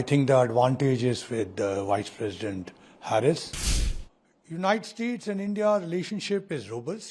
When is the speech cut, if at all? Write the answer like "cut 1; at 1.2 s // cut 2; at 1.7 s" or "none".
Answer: cut 1; at 3.9 s